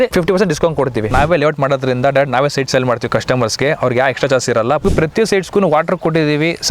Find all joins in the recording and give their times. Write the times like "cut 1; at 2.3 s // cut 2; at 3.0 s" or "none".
cut 1; at 1.1 s // cut 2; at 4.8 s